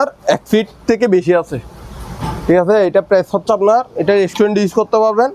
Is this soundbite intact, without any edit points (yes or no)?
yes